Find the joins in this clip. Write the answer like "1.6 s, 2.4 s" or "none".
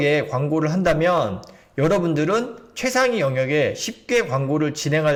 none